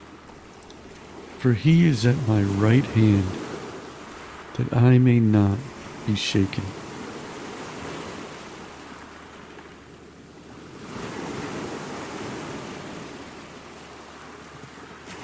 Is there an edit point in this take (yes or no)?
no